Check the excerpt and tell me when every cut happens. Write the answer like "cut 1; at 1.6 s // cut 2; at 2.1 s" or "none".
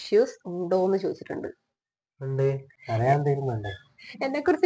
cut 1; at 2.7 s